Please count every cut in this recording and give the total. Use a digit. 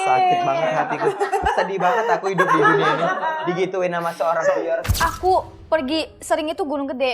1